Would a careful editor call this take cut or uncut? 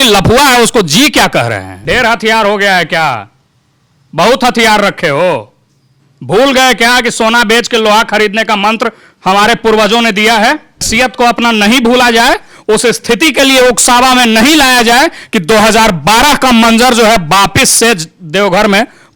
cut